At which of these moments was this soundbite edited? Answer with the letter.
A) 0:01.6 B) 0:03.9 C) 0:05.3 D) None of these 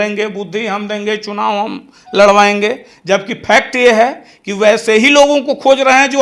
D